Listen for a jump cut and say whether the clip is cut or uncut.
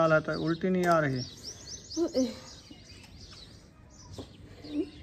cut